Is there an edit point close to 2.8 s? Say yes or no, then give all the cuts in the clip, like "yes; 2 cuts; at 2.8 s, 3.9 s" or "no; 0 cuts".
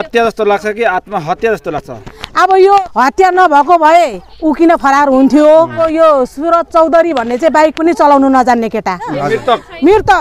yes; 3 cuts; at 2.8 s, 5.8 s, 9.2 s